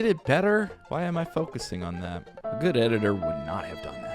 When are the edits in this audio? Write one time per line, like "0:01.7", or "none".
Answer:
0:02.3